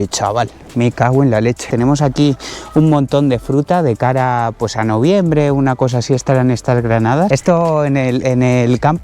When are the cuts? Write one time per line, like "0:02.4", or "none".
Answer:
0:01.6
0:07.3